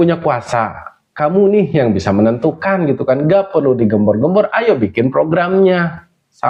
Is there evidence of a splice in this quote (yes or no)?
no